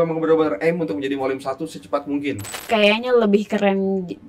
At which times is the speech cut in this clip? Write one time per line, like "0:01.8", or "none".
0:02.6